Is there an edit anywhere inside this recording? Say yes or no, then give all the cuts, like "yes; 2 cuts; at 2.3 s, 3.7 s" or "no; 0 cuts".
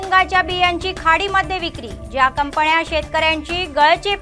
no; 0 cuts